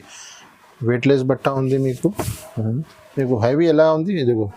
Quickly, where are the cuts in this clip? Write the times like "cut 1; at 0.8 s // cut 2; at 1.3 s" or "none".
none